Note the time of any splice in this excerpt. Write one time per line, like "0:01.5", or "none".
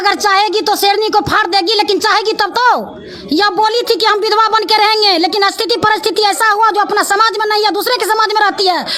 none